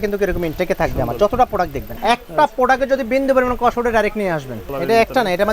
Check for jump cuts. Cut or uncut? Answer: cut